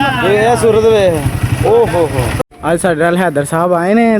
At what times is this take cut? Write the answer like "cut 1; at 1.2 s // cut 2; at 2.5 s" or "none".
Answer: cut 1; at 2.5 s